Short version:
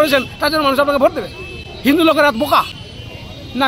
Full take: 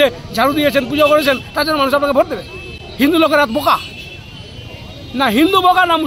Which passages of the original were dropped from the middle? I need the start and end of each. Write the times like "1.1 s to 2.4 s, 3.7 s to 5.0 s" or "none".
3.5 s to 4.0 s

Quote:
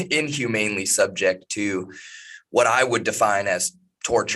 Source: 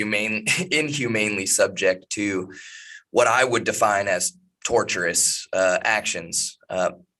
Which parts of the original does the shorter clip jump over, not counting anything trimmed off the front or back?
none

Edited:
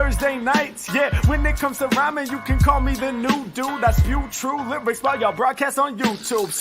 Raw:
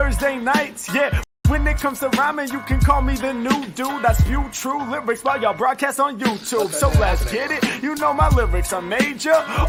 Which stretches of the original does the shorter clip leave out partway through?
1.2 s to 1.4 s

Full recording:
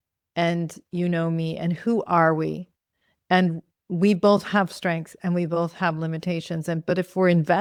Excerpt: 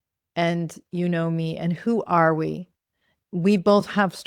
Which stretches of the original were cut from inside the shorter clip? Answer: 3.1 s to 3.7 s

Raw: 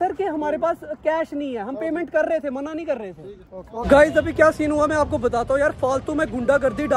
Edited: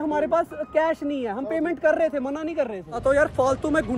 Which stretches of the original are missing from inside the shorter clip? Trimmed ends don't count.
3.3 s to 5.4 s

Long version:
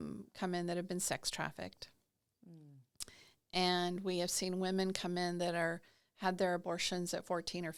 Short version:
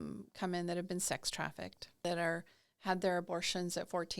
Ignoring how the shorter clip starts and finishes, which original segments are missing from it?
2.0 s to 5.4 s

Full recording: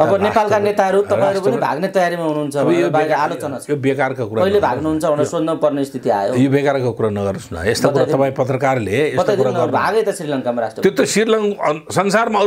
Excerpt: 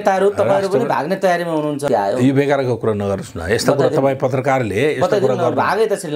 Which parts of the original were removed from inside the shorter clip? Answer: 2.5 s to 6.0 s

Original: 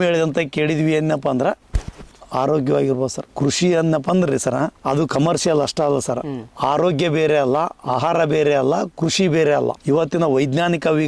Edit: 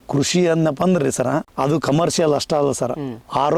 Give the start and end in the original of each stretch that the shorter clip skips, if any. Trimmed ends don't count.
none

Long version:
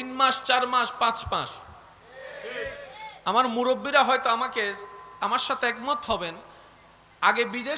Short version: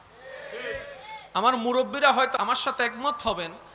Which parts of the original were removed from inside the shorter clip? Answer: 4.3 s to 5.2 s

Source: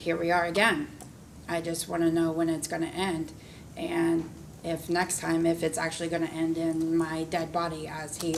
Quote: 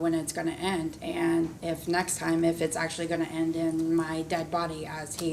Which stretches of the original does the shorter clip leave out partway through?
3.3 s to 3.7 s, 4.3 s to 4.6 s

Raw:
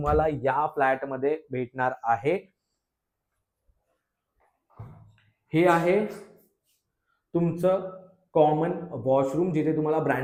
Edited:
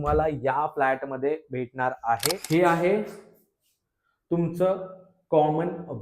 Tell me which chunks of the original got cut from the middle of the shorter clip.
2.4 s to 5.4 s

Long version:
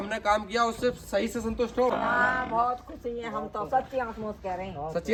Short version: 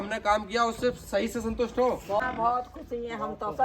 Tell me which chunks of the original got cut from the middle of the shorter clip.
2.1 s to 2.2 s

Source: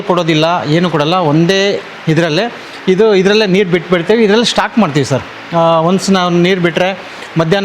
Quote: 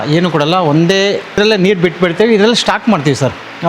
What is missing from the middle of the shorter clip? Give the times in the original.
2.0 s to 3.3 s

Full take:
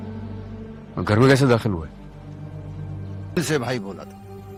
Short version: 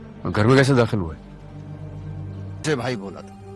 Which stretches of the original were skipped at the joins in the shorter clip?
3.3 s to 3.4 s

